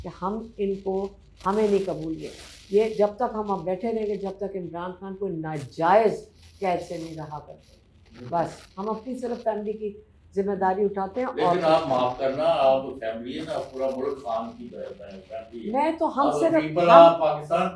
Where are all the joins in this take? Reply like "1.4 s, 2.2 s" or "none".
none